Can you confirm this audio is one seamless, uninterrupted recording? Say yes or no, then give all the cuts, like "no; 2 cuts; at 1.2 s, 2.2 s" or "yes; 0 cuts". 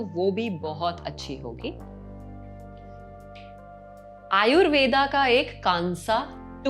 yes; 0 cuts